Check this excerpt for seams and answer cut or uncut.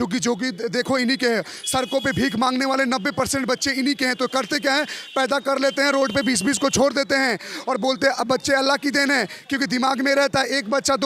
uncut